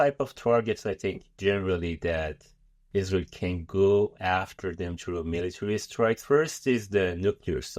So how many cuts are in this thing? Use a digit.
2